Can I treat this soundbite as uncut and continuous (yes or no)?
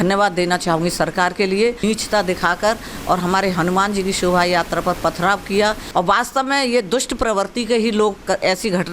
no